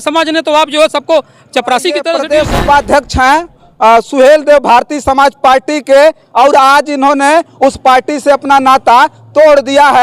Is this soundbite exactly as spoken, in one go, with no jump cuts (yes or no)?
no